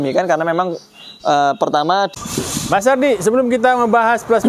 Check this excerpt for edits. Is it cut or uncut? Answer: cut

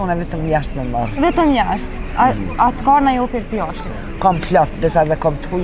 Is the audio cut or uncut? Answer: uncut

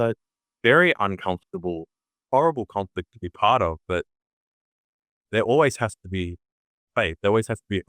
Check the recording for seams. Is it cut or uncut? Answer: uncut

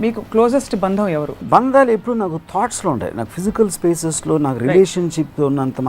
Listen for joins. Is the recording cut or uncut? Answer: cut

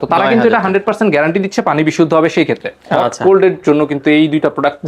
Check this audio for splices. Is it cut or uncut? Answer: cut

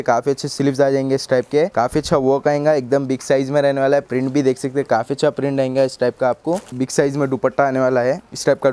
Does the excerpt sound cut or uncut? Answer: cut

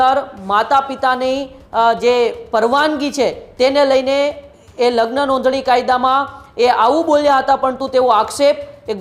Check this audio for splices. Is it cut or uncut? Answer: uncut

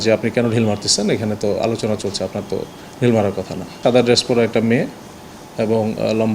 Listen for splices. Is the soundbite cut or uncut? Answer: cut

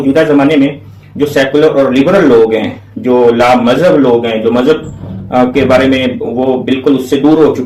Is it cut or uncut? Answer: uncut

